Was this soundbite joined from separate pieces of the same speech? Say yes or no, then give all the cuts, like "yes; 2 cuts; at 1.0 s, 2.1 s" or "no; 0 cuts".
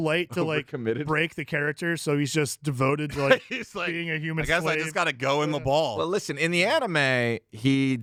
no; 0 cuts